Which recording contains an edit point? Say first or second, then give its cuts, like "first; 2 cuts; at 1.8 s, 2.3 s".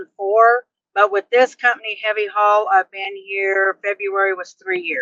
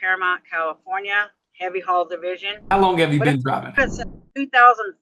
second; 2 cuts; at 2.7 s, 3.8 s